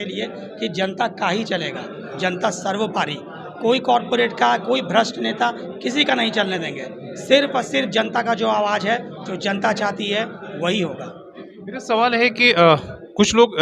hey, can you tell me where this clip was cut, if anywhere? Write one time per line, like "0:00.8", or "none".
none